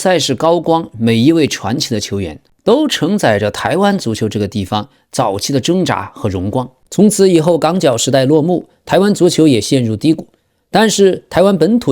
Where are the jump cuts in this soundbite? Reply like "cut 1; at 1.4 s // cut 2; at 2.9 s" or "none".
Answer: cut 1; at 6.8 s